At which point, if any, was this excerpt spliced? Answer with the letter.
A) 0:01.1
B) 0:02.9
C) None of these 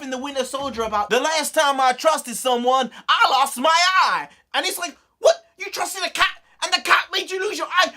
A